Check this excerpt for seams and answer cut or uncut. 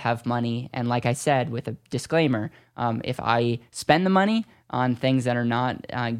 uncut